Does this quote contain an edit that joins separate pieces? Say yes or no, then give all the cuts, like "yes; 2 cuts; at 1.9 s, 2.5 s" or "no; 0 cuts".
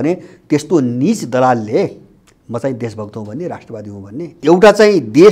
yes; 1 cut; at 4.4 s